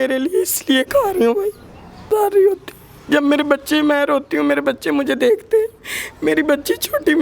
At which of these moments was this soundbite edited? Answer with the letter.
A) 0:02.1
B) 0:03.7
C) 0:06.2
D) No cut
A